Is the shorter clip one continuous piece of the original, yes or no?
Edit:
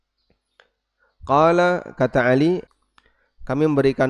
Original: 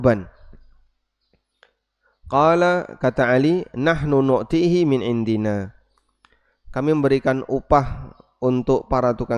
no